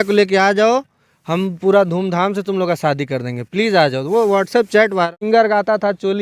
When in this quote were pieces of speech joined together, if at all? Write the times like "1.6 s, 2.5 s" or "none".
5.1 s